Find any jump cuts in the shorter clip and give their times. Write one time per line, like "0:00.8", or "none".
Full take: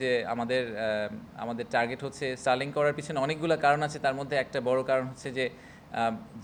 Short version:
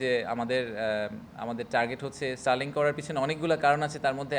none

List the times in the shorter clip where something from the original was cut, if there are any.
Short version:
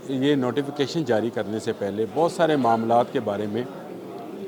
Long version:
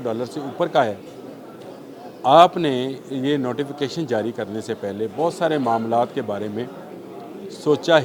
none

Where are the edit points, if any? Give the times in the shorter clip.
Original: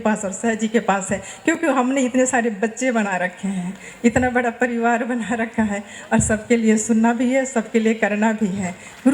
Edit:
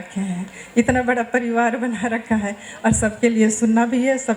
none

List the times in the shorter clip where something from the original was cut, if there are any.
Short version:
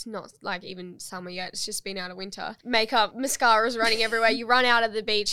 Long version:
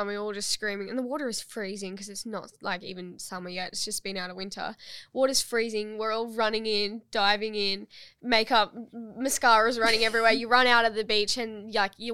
0:02.5
0:03.1

